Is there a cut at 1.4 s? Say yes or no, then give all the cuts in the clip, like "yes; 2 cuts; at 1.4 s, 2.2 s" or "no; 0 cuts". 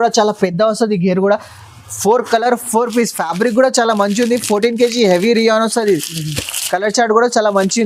no; 0 cuts